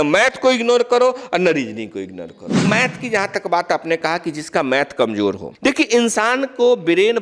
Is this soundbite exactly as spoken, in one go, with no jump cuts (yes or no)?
no